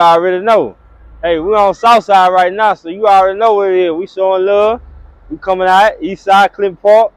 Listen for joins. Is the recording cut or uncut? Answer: uncut